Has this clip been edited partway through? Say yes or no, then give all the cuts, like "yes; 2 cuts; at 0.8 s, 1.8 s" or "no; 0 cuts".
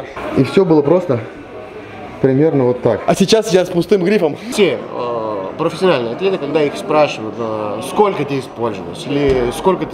yes; 2 cuts; at 3.0 s, 4.4 s